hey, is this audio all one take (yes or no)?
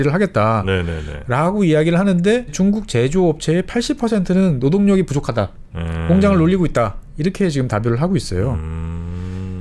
yes